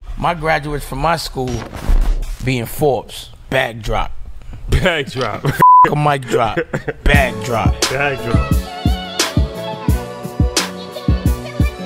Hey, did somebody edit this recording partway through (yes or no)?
no